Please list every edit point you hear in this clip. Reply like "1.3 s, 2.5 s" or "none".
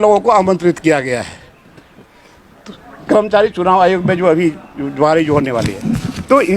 none